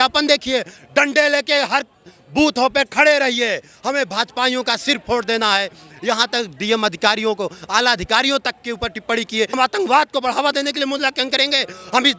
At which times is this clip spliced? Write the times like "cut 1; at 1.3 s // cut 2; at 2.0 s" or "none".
cut 1; at 9.6 s